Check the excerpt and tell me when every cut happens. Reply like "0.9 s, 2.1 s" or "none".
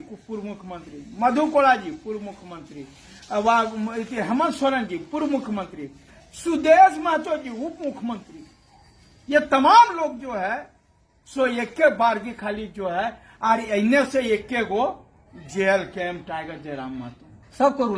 none